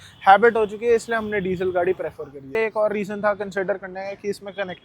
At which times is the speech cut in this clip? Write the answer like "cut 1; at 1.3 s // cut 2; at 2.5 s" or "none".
cut 1; at 2.5 s